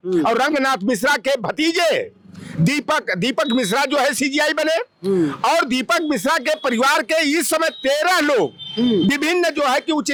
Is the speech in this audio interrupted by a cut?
no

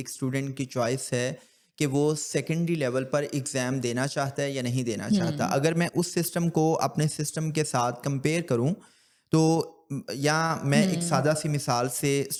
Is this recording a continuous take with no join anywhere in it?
yes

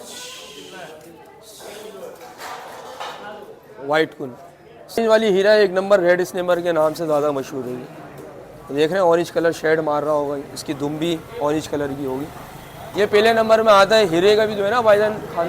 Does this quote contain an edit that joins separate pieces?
yes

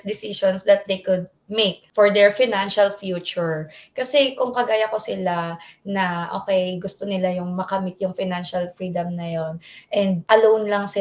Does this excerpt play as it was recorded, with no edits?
yes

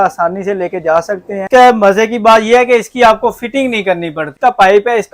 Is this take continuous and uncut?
no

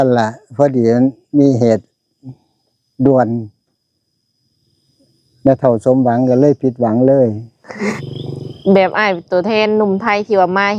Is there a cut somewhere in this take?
yes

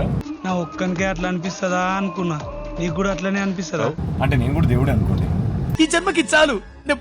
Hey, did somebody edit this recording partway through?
yes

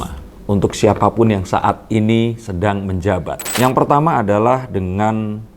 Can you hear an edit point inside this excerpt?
yes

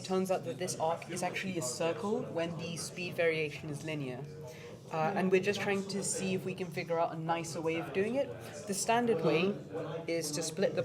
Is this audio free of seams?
yes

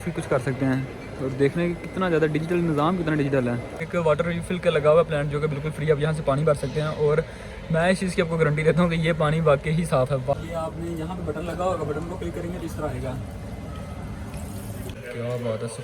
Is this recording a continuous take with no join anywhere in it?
no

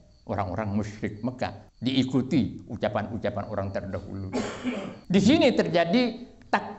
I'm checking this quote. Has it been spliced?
yes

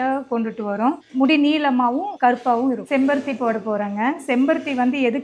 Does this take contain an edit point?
no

